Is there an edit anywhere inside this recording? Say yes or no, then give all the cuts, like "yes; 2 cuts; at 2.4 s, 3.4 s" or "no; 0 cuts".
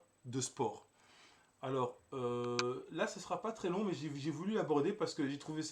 no; 0 cuts